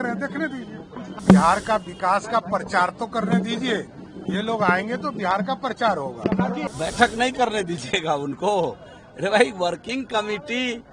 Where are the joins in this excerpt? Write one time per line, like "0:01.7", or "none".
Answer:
0:01.1
0:06.6